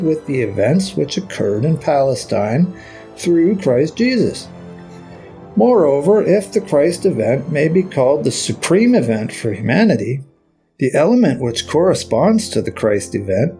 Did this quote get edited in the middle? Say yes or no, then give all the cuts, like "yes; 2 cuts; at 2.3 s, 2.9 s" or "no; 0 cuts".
no; 0 cuts